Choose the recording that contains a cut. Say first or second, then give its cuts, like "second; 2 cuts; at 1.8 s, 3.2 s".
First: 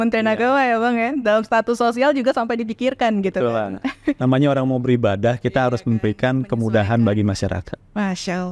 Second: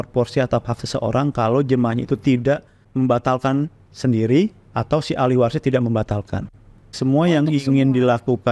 second; 2 cuts; at 2.8 s, 6.8 s